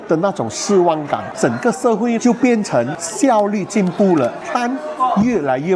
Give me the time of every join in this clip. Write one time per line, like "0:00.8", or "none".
0:01.3
0:03.0
0:04.4